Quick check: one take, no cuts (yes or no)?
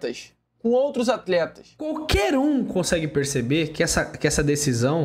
no